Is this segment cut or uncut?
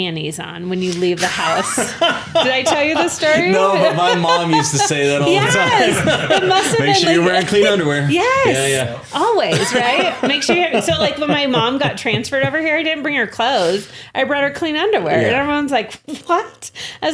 uncut